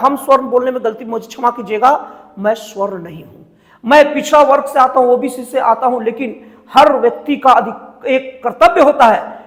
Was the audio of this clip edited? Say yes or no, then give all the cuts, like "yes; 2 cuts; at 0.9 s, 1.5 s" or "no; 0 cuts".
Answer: no; 0 cuts